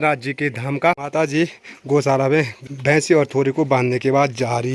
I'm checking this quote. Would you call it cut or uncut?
cut